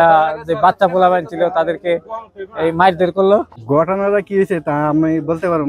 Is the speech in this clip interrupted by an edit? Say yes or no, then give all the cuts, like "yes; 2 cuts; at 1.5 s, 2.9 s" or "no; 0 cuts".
no; 0 cuts